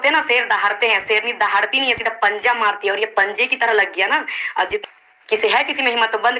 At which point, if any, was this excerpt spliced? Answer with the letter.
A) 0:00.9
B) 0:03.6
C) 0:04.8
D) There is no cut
C